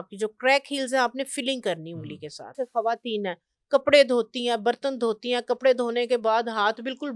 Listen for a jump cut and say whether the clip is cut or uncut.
cut